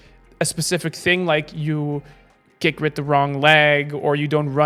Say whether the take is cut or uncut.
uncut